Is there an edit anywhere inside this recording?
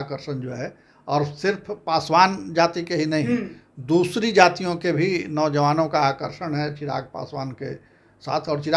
no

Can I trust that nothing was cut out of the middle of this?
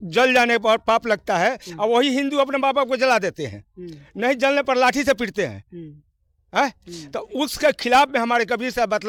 yes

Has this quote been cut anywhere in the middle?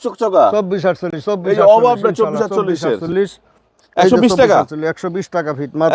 no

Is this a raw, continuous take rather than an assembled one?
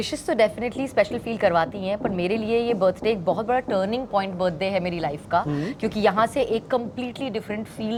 yes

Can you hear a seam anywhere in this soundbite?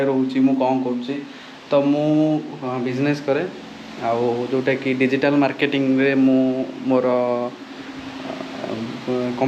no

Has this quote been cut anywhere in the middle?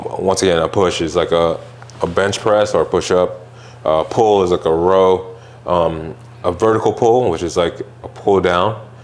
no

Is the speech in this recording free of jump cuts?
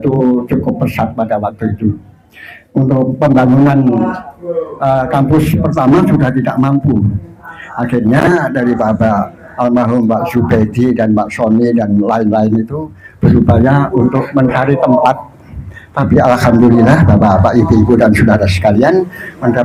yes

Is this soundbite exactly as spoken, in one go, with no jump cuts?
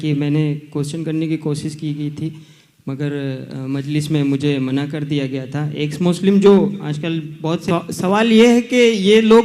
no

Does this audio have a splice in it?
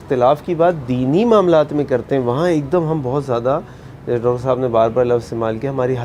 no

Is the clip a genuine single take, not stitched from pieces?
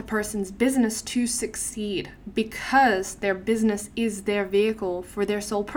yes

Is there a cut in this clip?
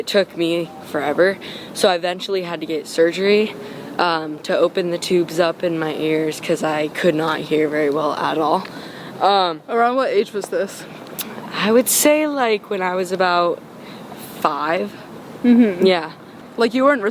no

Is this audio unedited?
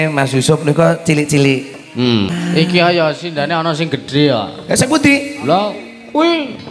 no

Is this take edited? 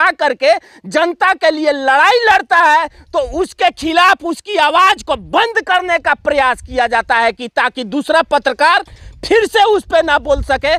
no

